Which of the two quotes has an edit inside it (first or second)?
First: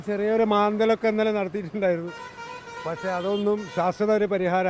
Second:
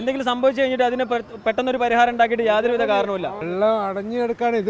second